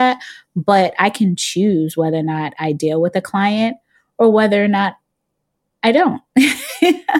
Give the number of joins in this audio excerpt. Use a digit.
0